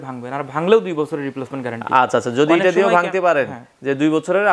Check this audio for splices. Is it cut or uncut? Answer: uncut